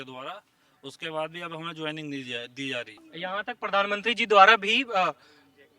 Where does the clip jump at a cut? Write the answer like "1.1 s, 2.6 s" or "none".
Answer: 3.1 s